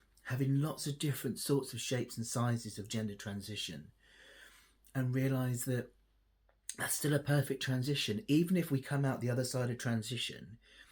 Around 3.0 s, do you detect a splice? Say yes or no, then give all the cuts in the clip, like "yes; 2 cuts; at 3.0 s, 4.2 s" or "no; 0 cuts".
no; 0 cuts